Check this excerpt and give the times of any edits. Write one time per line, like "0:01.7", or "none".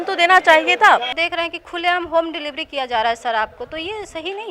0:01.1